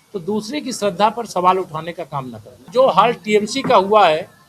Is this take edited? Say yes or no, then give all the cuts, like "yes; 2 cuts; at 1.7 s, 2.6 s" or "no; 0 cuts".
yes; 1 cut; at 2.7 s